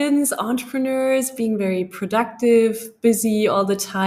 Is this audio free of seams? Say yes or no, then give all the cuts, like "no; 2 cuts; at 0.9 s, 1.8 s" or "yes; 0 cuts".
yes; 0 cuts